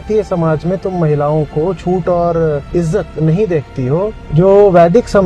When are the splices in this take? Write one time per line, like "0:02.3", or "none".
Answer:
0:02.6
0:04.2